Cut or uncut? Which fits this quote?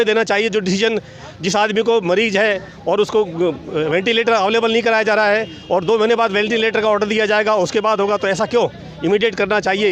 uncut